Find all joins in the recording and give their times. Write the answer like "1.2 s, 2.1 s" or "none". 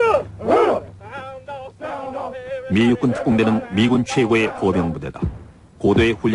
none

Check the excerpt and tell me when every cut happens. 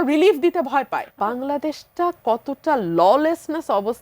1.1 s

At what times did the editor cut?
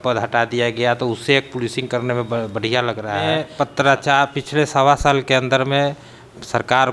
3.4 s

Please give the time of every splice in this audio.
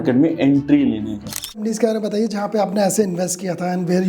1.7 s

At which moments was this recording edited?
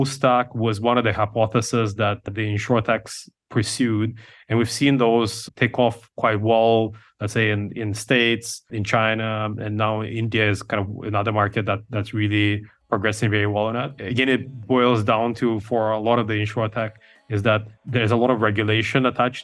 none

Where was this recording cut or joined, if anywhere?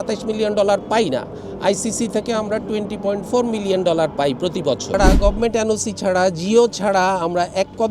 4.9 s

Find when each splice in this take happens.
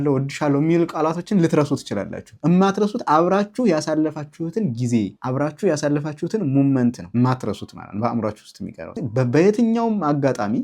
9.0 s

